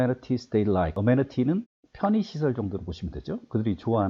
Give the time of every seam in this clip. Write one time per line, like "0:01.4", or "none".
0:01.0